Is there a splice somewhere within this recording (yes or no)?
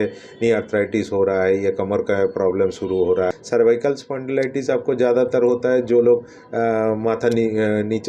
yes